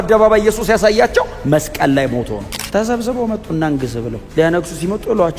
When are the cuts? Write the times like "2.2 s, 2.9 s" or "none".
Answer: 2.4 s